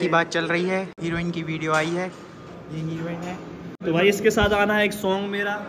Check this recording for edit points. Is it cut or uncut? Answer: cut